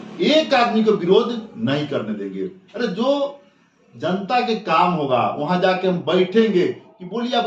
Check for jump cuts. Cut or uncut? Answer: uncut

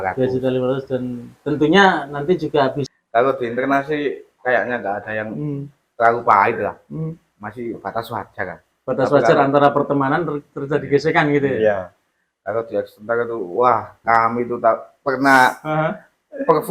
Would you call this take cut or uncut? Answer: cut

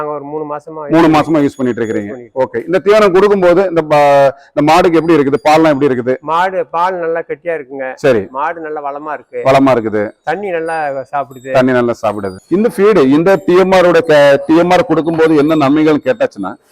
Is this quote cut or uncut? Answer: cut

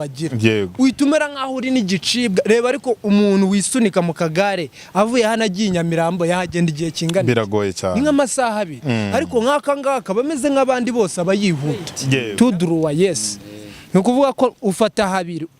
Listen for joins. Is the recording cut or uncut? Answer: cut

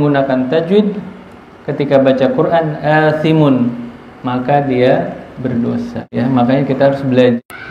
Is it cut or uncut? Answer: uncut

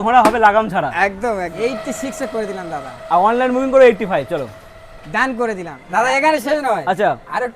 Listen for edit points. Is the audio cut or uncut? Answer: cut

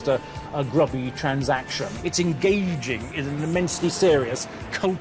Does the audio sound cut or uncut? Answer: cut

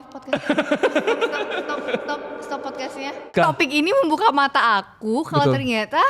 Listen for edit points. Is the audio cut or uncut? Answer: cut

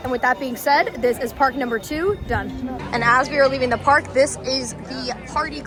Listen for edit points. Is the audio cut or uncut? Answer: uncut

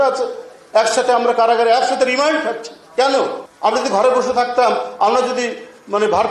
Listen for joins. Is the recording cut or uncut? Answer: cut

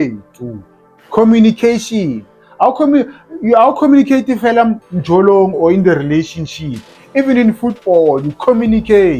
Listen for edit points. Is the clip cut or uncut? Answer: uncut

